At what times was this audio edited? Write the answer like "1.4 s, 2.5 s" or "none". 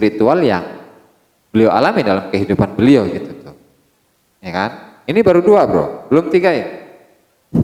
none